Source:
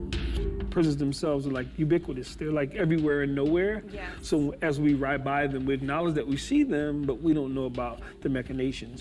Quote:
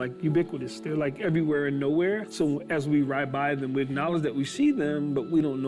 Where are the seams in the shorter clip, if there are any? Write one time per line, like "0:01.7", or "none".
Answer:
0:02.3